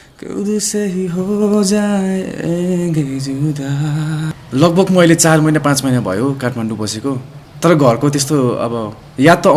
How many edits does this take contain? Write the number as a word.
one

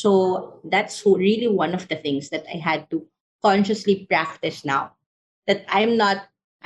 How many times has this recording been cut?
zero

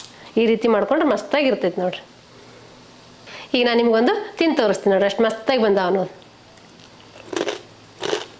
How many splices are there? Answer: one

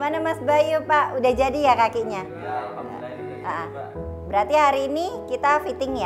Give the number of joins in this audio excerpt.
zero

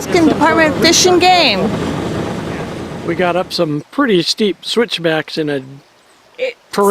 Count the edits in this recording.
one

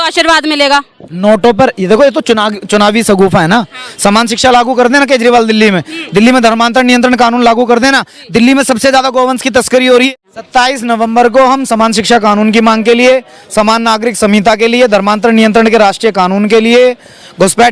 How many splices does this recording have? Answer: one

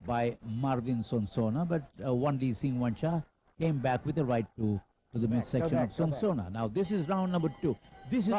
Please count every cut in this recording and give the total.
zero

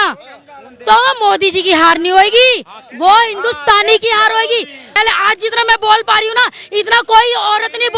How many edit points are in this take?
one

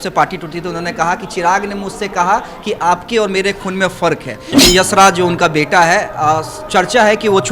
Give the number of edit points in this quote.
one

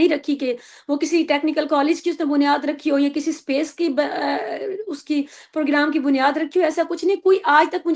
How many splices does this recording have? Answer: zero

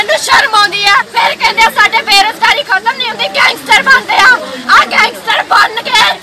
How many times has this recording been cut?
one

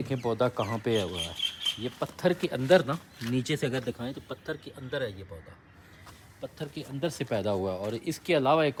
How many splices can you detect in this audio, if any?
zero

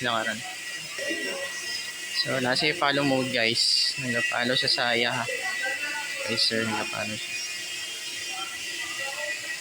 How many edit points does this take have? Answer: one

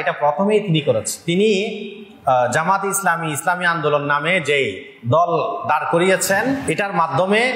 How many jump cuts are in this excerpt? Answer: two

